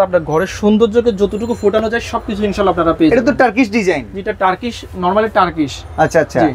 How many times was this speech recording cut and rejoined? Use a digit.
0